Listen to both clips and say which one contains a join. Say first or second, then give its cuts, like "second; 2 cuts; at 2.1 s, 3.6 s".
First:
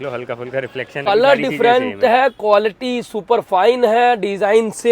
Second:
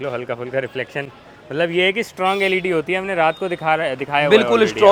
first; 1 cut; at 1.0 s